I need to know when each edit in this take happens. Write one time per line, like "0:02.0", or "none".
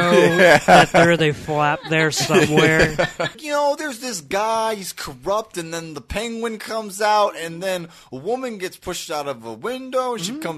0:03.4